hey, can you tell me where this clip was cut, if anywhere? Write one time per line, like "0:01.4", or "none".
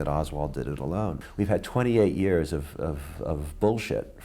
0:01.3